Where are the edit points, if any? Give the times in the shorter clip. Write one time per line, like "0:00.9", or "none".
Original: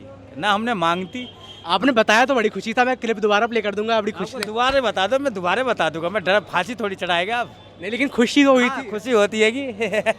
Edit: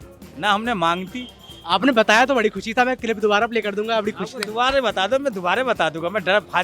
none